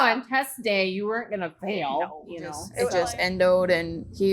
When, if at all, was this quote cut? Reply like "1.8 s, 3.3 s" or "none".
2.9 s